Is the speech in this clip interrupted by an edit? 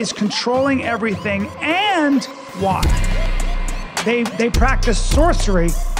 no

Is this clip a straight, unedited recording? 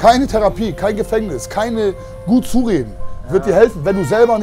yes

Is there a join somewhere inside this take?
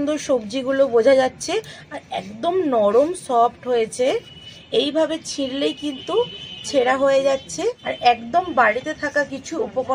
yes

